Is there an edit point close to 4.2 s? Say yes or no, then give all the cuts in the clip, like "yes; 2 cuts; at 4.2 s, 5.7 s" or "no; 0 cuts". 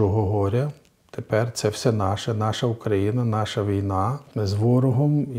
yes; 1 cut; at 4.2 s